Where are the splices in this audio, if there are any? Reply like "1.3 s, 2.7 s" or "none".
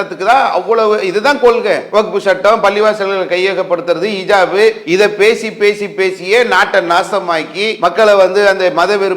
1.8 s, 4.8 s, 7.7 s